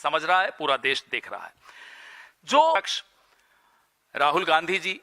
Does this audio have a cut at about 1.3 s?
no; 1 cut; at 2.8 s

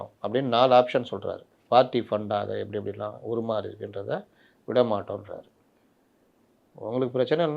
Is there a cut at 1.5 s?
yes; 1 cut; at 1.5 s

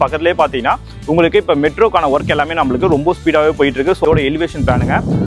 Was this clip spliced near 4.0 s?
yes; 1 cut; at 4.0 s

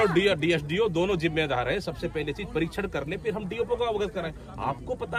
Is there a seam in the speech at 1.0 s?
no; 0 cuts

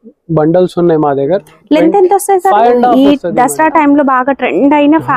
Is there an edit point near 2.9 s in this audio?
yes; 1 cut; at 2.9 s

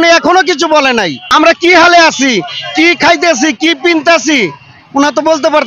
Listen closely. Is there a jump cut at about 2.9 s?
no; 1 cut; at 1.2 s

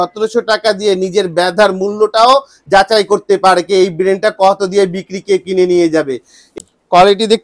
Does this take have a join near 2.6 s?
no; 1 cut; at 6.4 s

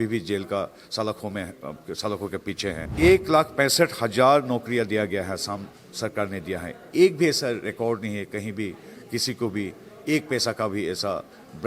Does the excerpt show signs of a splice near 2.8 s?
yes; 1 cut; at 2.8 s

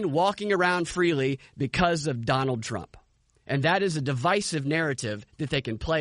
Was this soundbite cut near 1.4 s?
no; 0 cuts

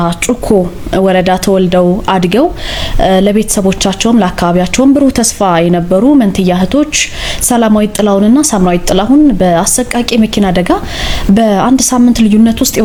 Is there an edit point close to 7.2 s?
no; 0 cuts

